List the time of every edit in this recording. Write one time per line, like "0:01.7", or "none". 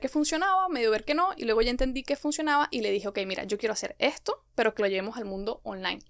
none

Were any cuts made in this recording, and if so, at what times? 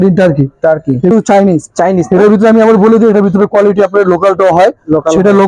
0:01.1

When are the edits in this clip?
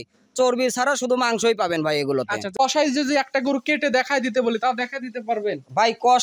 0:02.5

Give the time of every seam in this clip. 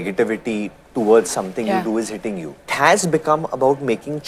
0:02.7

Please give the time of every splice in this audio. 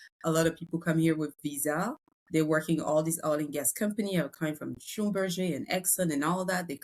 none

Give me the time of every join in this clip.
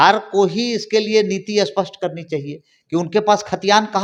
none

